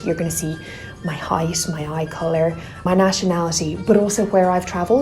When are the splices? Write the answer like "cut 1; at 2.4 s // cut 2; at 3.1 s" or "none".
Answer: cut 1; at 2.7 s